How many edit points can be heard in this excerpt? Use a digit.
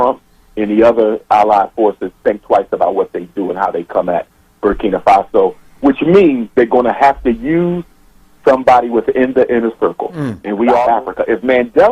1